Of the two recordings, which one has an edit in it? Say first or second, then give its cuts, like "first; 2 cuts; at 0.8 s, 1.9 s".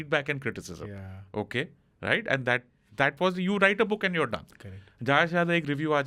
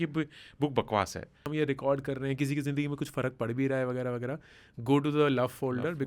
second; 1 cut; at 1.5 s